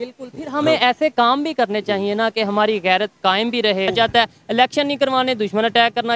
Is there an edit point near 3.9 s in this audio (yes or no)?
yes